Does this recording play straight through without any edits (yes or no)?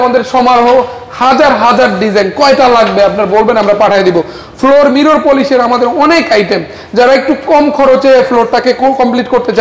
yes